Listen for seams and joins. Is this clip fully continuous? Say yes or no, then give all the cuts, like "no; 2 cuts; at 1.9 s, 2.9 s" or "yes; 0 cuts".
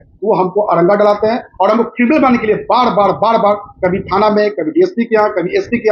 yes; 0 cuts